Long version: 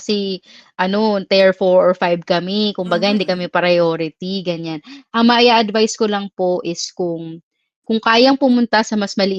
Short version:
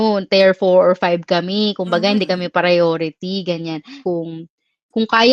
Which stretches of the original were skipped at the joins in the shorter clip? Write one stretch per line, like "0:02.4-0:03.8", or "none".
0:04.9-0:06.8